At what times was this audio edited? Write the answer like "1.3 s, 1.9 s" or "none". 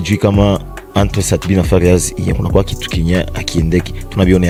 none